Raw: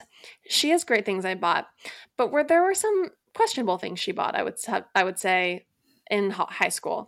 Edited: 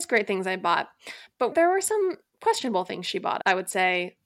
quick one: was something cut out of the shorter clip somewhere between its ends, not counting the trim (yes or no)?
yes